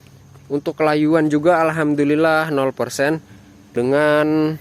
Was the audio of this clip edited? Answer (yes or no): yes